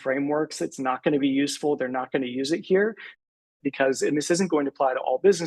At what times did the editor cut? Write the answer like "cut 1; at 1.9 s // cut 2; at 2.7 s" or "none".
cut 1; at 3.3 s